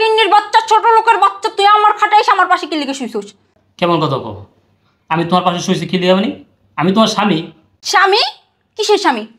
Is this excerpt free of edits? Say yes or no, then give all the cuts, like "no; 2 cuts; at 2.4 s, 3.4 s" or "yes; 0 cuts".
yes; 0 cuts